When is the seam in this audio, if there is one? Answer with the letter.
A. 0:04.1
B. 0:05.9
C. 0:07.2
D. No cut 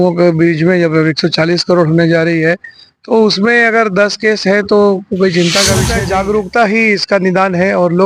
B